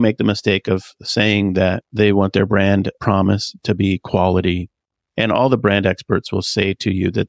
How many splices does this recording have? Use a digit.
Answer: 1